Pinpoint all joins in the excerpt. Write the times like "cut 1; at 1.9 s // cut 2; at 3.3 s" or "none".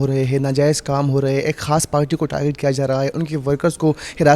none